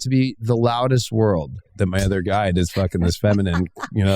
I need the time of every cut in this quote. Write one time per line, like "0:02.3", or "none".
0:01.6